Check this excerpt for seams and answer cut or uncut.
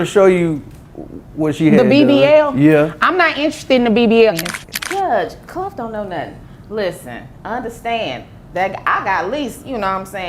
cut